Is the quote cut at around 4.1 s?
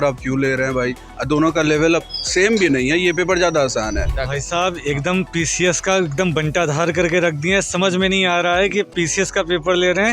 yes; 1 cut; at 4.1 s

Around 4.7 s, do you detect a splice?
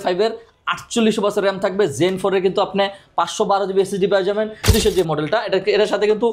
yes; 1 cut; at 4.7 s

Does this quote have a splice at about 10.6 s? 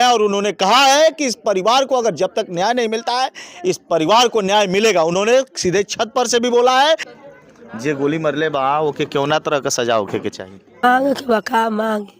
yes; 2 cuts; at 7.1 s, 10.6 s

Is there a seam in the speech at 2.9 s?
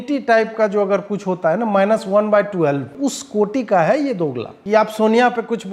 yes; 2 cuts; at 2.9 s, 4.5 s

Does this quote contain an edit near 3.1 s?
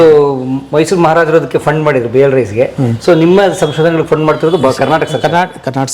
no; 0 cuts

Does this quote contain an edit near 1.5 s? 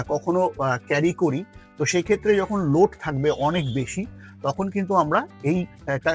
no; 0 cuts

